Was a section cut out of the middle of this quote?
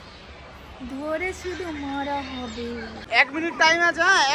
yes; 1 cut; at 3.0 s

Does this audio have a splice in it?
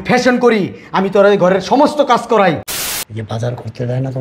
yes; 1 cut; at 2.7 s

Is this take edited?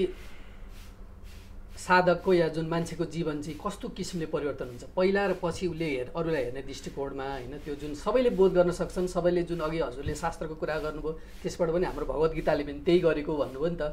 no; 0 cuts

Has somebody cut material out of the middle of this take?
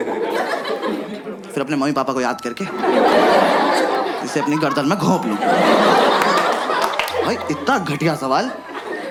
no; 0 cuts

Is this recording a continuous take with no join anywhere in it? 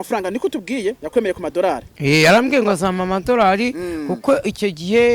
yes; 0 cuts

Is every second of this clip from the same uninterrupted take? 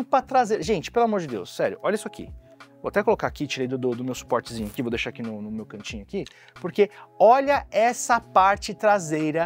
yes; 0 cuts

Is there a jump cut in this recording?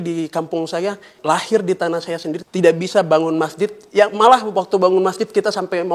yes; 2 cuts; at 1.1 s, 2.4 s

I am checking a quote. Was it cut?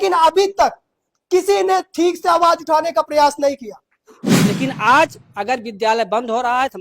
yes; 1 cut; at 4.2 s

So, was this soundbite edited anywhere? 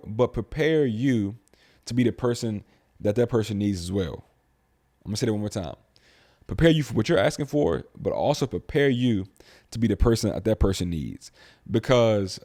no; 0 cuts

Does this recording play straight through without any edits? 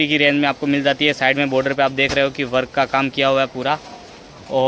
yes; 0 cuts

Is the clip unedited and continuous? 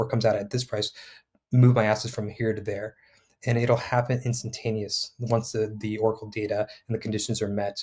yes; 0 cuts

